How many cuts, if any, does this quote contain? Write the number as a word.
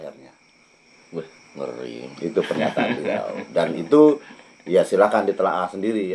zero